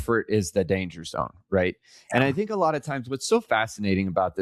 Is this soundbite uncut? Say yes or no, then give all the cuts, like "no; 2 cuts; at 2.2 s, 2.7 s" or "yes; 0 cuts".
yes; 0 cuts